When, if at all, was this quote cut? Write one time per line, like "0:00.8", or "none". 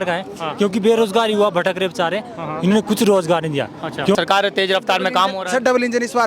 0:04.1